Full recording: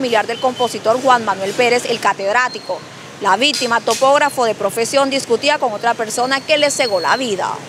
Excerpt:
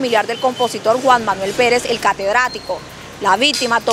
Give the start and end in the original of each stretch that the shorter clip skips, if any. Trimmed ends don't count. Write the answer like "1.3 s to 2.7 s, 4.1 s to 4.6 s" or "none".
none